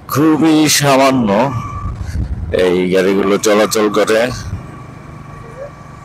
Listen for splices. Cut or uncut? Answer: uncut